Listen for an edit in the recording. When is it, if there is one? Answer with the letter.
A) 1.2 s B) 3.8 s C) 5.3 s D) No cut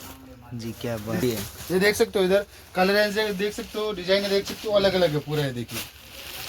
A